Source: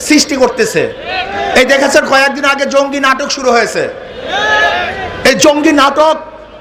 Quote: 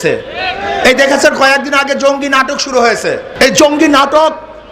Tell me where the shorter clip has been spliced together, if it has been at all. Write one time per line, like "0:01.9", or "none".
0:03.3